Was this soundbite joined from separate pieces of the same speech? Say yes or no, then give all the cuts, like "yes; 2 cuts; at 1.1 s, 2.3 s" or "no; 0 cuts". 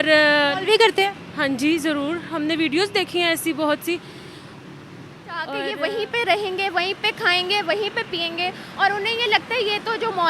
yes; 1 cut; at 5.6 s